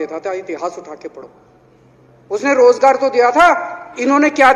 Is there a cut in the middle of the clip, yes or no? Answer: no